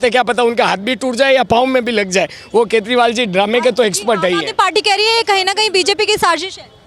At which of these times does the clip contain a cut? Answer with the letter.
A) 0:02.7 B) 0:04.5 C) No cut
C